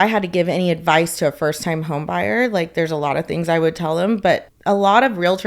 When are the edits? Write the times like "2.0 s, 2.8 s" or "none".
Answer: 4.5 s